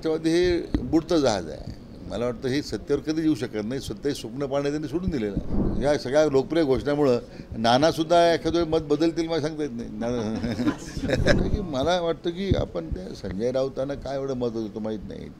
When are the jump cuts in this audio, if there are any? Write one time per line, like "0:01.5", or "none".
0:05.6
0:11.4